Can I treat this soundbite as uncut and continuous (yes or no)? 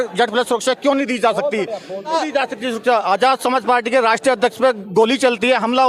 no